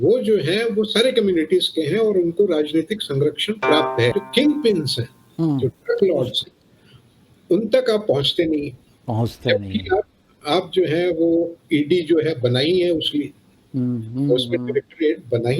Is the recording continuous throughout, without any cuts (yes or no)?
no